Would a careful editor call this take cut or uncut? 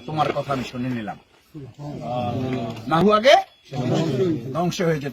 uncut